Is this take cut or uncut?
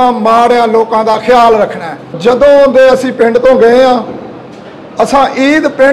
cut